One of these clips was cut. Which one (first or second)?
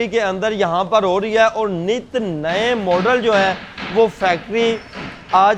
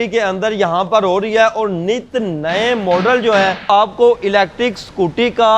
second